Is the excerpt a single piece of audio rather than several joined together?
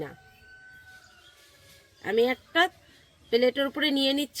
yes; 0 cuts

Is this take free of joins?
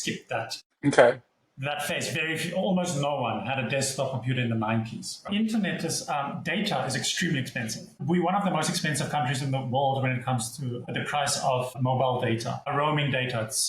no; 1 cut; at 5.2 s

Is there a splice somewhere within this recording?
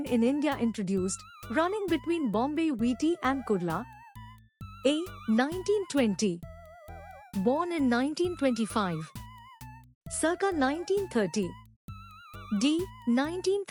no; 0 cuts

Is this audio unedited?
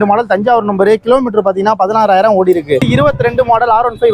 no; 1 cut; at 2.8 s

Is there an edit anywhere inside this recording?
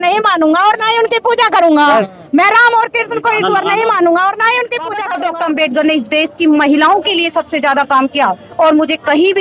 yes; 1 cut; at 5.1 s

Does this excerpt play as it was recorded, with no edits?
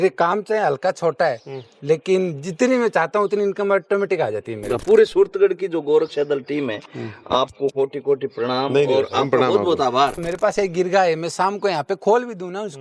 no; 2 cuts; at 4.8 s, 10.2 s

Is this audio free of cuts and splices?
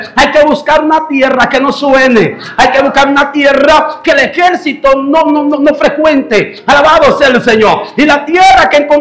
yes; 0 cuts

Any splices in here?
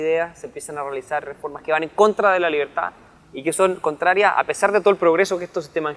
yes; 1 cut; at 3.6 s

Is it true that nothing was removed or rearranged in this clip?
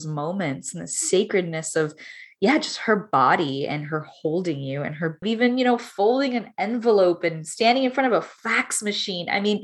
no; 1 cut; at 5.2 s

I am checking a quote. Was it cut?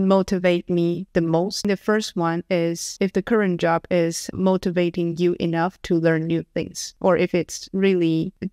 yes; 2 cuts; at 1.7 s, 4.2 s

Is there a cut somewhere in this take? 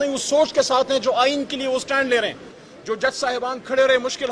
no; 0 cuts

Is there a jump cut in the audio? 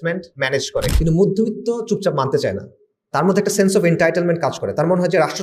yes; 1 cut; at 0.9 s

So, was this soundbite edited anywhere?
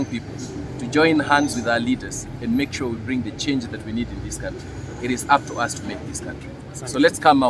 no; 0 cuts

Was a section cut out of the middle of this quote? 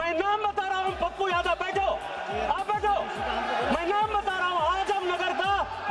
no; 0 cuts

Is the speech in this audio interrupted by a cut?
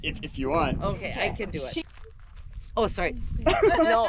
yes; 1 cut; at 1.8 s

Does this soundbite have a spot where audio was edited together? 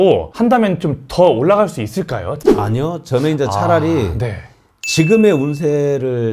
yes; 1 cut; at 2.3 s

